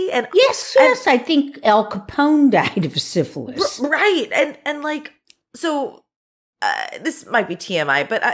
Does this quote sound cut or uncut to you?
uncut